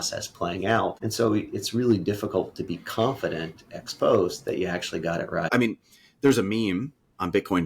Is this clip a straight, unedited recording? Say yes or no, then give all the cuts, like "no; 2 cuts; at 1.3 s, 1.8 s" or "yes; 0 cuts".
no; 2 cuts; at 1.0 s, 5.5 s